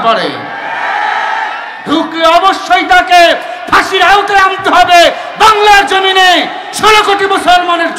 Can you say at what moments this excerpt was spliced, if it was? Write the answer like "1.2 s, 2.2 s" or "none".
none